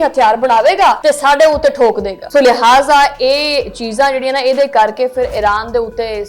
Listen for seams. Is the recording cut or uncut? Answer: cut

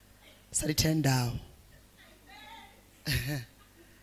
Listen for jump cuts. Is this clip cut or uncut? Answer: uncut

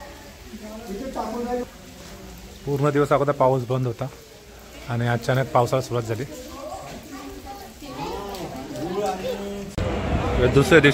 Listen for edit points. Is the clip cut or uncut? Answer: cut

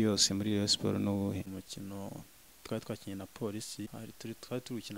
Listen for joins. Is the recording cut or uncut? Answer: cut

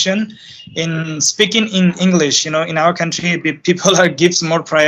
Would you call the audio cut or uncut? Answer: uncut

